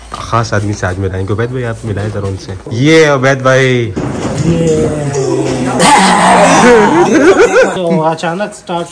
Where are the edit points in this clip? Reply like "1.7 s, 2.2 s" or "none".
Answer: 2.7 s, 5.8 s, 7.7 s